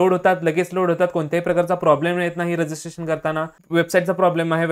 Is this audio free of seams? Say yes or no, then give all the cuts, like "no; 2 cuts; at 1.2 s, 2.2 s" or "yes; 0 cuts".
no; 1 cut; at 3.6 s